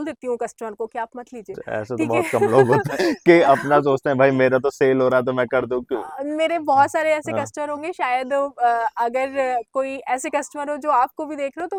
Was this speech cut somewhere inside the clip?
no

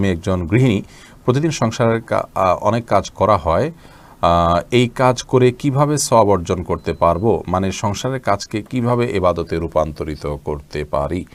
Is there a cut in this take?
no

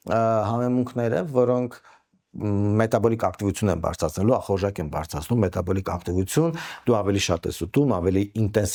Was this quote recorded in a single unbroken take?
yes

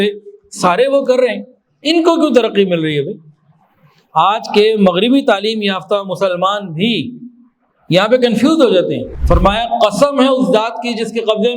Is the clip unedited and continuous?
no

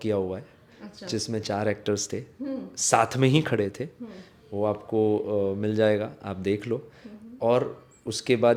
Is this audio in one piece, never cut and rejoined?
yes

